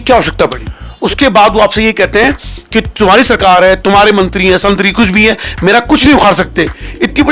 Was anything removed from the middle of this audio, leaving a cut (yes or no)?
yes